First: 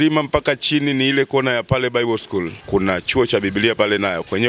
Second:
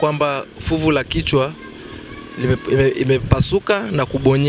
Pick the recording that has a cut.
first; 1 cut; at 2.6 s

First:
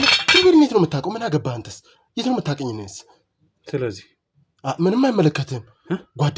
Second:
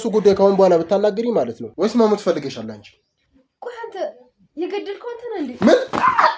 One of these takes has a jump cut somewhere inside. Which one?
second; 1 cut; at 1.6 s

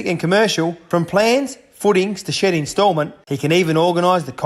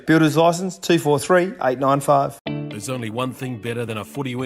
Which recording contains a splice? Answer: second; 1 cut; at 2.4 s

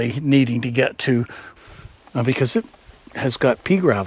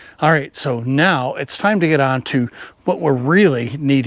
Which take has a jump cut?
first; 1 cut; at 1.4 s

